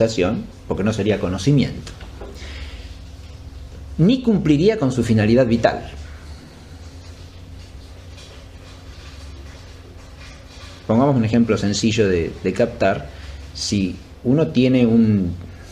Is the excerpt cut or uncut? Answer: cut